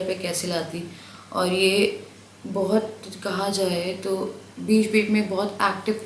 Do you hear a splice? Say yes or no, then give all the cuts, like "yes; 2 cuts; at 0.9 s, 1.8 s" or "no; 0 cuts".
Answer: no; 0 cuts